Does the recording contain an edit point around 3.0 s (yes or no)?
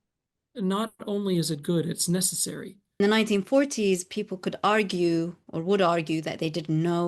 yes